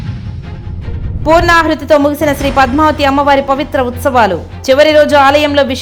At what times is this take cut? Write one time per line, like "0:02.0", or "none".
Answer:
none